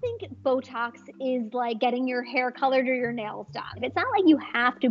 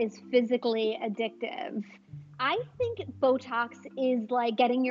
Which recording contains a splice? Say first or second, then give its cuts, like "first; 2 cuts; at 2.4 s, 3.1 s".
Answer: first; 1 cut; at 3.9 s